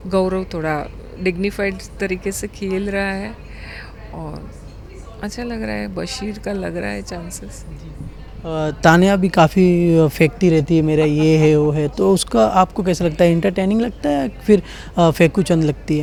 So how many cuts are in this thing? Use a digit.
0